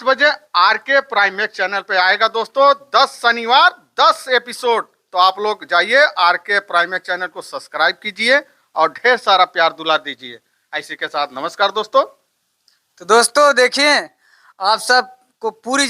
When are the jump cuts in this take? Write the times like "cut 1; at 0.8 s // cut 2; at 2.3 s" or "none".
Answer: none